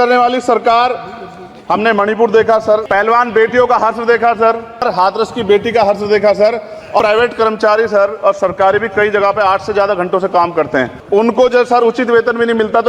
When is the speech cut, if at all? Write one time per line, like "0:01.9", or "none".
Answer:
0:02.8
0:04.8
0:07.0
0:11.0